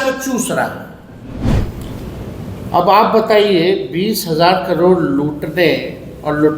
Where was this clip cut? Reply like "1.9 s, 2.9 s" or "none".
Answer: 1.5 s